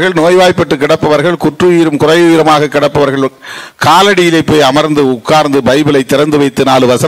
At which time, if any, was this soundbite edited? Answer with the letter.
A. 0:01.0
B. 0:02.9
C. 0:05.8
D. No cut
D